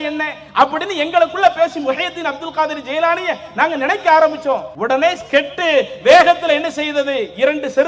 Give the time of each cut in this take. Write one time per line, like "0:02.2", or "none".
0:04.7